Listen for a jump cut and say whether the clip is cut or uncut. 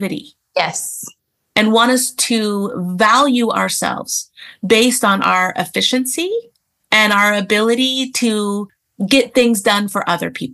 uncut